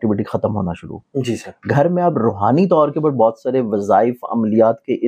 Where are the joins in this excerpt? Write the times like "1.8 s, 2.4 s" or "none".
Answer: none

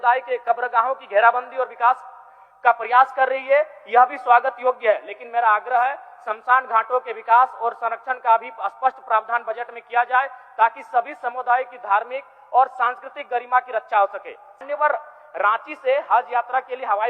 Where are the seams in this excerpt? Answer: 14.6 s

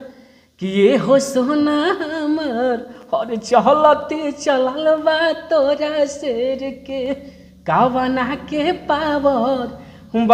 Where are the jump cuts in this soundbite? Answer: none

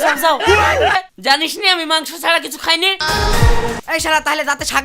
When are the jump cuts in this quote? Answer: 1.0 s, 3.0 s

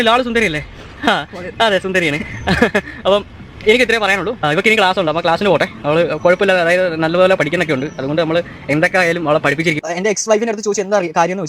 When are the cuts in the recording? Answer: 9.8 s

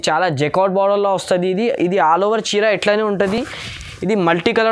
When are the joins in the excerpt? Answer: none

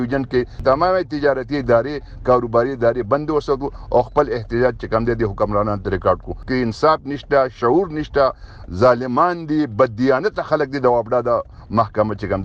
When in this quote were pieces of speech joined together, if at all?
6.3 s

